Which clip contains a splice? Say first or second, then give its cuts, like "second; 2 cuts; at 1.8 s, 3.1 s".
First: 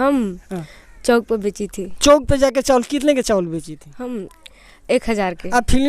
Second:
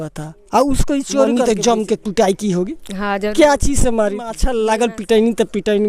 second; 2 cuts; at 1.4 s, 4.4 s